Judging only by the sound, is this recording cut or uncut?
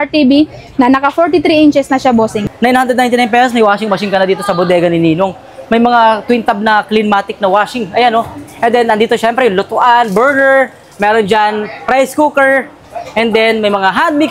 cut